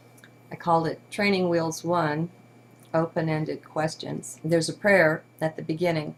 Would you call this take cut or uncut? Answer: uncut